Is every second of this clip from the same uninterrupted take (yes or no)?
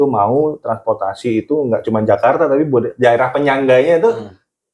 yes